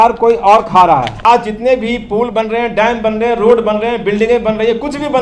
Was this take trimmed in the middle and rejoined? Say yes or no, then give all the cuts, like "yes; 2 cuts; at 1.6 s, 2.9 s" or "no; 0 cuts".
yes; 1 cut; at 1.2 s